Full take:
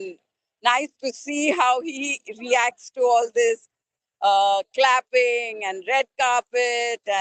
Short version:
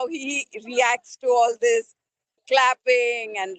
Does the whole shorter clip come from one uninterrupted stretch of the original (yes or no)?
no